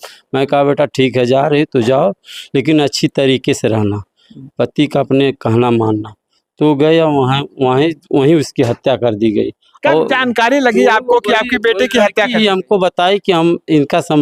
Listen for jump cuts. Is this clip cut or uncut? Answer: uncut